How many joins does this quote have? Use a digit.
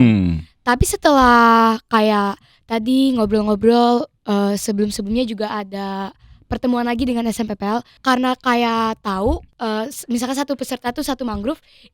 2